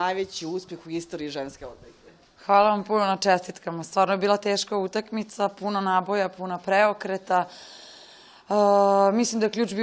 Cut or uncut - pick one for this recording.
uncut